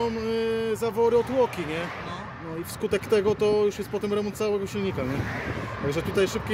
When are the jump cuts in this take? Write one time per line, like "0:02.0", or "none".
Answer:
none

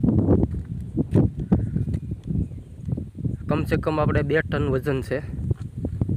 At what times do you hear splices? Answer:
none

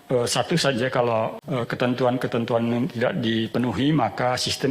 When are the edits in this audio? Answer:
0:01.4

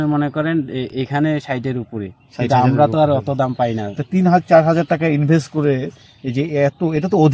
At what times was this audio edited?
none

